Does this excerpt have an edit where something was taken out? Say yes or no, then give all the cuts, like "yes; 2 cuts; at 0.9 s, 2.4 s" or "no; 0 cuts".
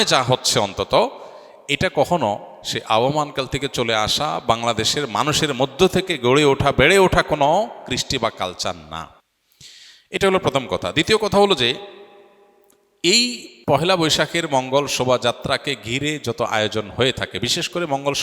no; 0 cuts